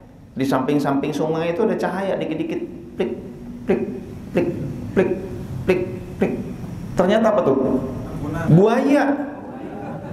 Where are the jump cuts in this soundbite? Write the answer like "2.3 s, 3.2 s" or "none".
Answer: 8.3 s

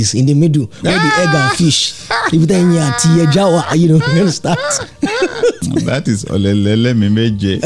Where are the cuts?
5.6 s

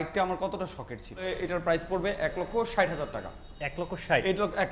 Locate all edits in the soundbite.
1.3 s

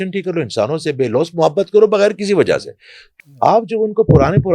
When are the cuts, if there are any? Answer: 3.2 s

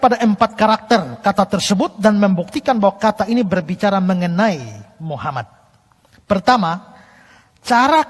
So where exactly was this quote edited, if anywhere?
none

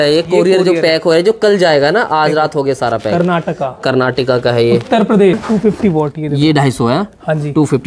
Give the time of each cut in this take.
5.4 s

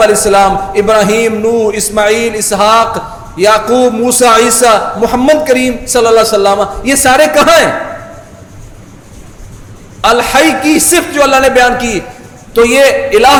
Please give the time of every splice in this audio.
none

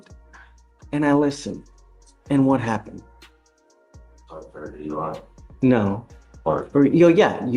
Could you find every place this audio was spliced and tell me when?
none

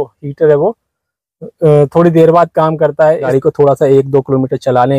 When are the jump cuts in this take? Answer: 3.3 s

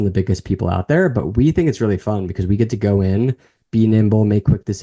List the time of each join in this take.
none

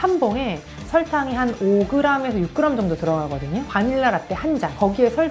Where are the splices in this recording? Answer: 3.7 s

